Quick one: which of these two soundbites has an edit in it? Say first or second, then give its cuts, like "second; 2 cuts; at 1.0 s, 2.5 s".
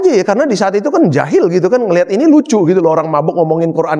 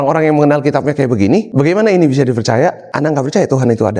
second; 2 cuts; at 1.5 s, 2.9 s